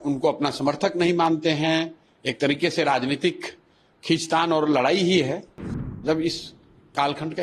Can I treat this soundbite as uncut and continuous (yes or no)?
no